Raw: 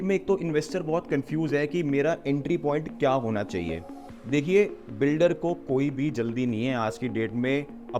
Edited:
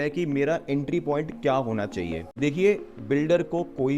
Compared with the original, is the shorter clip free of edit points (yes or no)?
no